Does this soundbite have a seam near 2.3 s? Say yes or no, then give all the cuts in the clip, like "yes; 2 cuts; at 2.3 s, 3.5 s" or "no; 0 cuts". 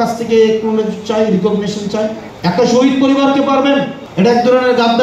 yes; 2 cuts; at 2.3 s, 4.0 s